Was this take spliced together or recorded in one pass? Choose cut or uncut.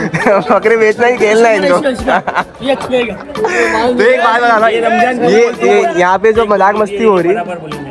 uncut